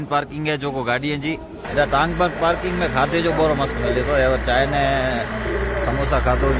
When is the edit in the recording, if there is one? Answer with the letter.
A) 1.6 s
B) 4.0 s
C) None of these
A